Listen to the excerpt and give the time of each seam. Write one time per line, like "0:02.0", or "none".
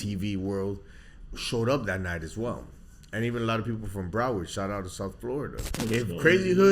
0:05.8